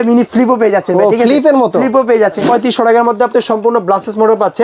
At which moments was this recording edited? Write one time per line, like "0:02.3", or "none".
0:02.4